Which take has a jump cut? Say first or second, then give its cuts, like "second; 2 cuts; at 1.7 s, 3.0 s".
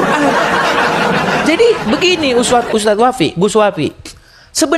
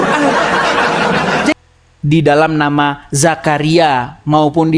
second; 1 cut; at 1.6 s